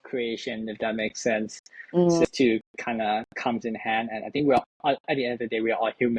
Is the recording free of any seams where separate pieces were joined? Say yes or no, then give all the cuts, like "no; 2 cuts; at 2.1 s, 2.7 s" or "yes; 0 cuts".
no; 1 cut; at 2.2 s